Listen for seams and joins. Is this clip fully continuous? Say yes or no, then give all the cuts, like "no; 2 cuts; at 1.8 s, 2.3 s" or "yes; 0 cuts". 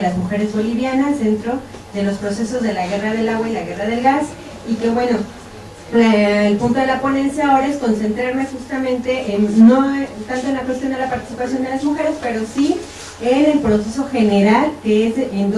no; 1 cut; at 1.6 s